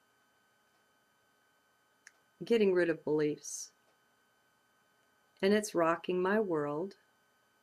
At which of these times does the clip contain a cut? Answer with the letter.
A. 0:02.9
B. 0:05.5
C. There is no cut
C